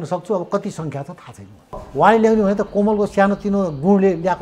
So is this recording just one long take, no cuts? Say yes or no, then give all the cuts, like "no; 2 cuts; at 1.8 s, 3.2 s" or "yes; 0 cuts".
no; 1 cut; at 1.9 s